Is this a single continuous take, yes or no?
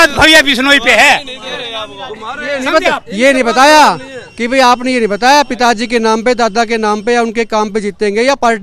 yes